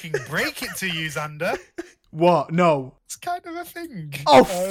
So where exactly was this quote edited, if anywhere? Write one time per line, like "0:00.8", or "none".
0:03.0